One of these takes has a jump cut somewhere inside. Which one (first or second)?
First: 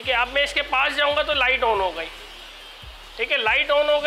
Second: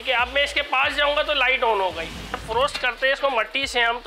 second